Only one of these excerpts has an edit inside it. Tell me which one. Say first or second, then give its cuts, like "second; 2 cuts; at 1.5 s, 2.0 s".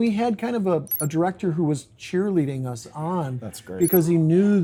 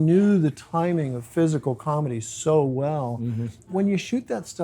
second; 1 cut; at 3.7 s